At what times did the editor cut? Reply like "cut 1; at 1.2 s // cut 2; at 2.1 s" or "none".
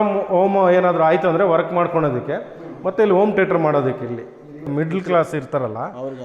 cut 1; at 4.6 s